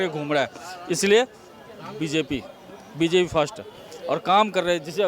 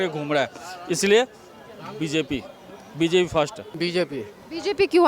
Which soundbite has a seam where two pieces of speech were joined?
second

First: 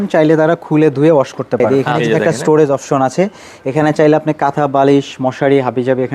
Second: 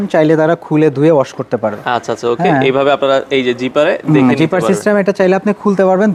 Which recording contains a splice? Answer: first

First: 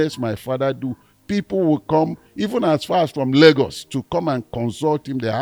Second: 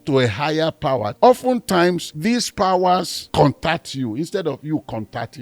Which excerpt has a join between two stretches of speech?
second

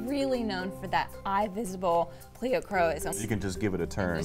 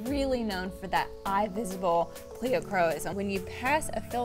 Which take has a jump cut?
second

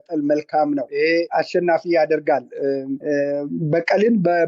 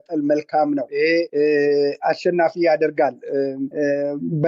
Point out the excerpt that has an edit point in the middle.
first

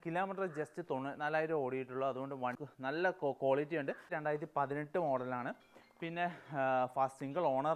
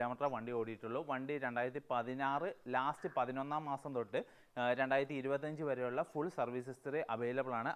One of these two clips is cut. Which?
first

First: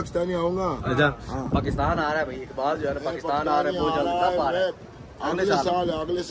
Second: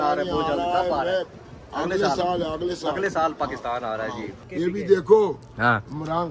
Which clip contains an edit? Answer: second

